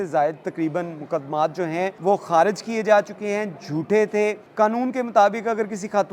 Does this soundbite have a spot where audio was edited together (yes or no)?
yes